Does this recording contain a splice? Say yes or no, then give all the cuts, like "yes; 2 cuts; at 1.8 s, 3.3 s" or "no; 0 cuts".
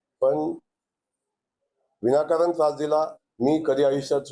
yes; 1 cut; at 3.2 s